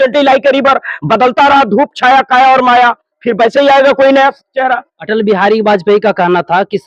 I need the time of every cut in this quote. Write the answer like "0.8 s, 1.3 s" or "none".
none